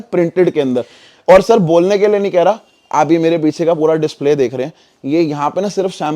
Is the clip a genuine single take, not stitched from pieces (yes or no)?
yes